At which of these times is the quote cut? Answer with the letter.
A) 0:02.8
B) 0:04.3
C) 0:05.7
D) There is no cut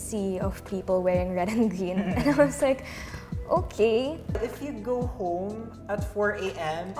B